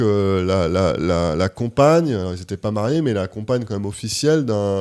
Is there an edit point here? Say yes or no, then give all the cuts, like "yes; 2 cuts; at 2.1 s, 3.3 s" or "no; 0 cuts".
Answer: no; 0 cuts